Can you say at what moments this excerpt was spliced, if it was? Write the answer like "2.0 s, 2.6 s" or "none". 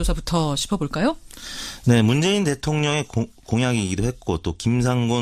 3.2 s